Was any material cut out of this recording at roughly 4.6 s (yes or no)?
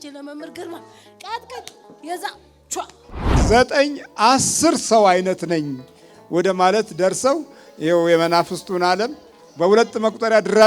no